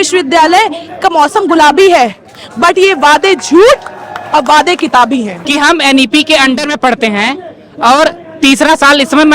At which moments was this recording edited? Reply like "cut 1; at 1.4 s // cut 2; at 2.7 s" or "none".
cut 1; at 5.4 s